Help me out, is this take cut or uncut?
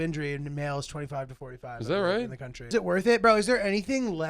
cut